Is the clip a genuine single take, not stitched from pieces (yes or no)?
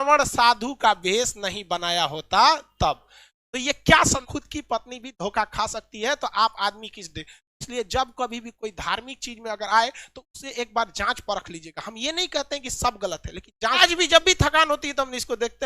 no